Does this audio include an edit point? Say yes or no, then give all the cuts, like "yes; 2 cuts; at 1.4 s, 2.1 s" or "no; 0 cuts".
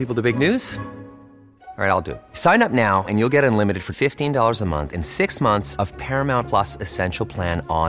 no; 0 cuts